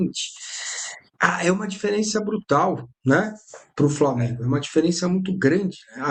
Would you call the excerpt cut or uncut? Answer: uncut